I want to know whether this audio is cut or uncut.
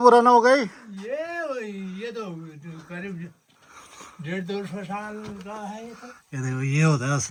uncut